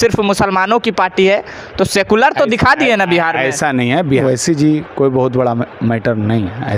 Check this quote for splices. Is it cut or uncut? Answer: cut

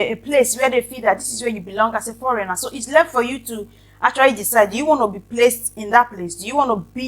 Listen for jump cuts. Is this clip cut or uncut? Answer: uncut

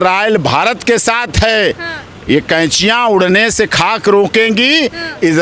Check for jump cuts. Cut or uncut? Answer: uncut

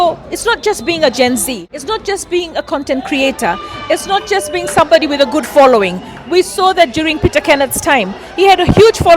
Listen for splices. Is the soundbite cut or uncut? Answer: cut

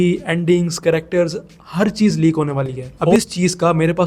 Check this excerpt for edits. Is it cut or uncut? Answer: cut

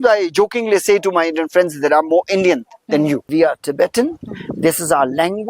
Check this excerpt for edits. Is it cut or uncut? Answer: cut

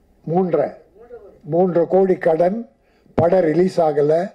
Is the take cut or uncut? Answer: uncut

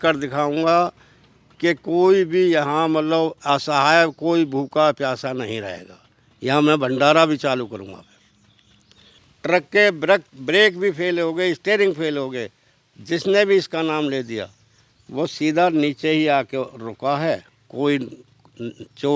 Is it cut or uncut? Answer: cut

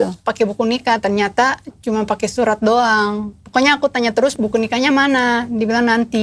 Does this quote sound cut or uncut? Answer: cut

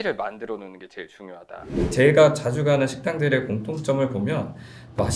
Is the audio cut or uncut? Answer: cut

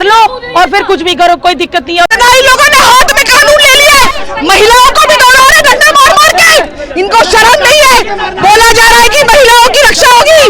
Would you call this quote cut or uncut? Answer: cut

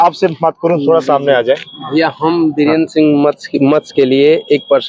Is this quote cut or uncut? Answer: uncut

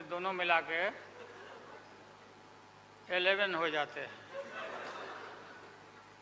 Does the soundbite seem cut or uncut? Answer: uncut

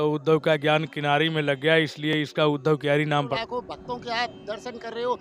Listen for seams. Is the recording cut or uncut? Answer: cut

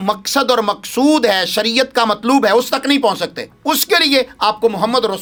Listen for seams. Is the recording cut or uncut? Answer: uncut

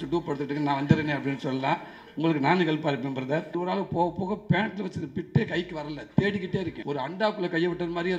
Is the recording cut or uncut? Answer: cut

